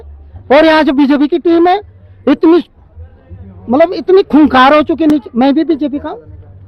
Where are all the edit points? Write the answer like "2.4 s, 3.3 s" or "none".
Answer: none